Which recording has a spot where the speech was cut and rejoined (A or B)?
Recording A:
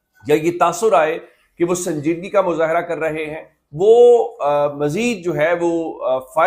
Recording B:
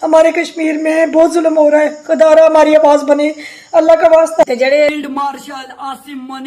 B